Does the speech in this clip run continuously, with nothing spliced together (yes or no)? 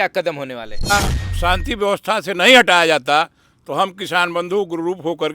no